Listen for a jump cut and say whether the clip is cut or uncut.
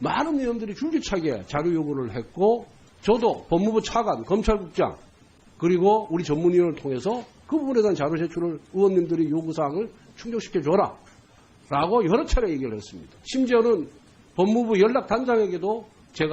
cut